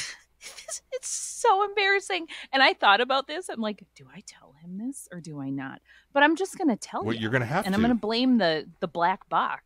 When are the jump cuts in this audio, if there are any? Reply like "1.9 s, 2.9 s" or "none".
none